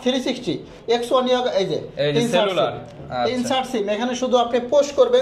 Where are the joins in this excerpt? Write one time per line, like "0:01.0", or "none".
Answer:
none